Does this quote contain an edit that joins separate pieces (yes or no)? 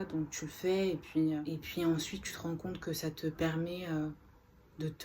yes